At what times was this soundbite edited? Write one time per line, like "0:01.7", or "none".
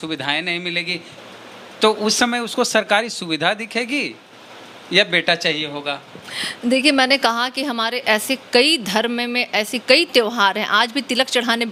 none